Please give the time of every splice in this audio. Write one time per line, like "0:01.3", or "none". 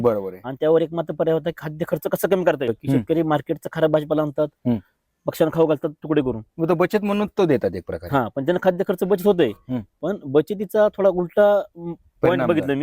0:02.8